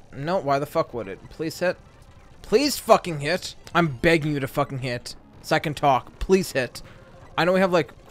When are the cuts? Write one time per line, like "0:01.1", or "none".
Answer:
0:03.6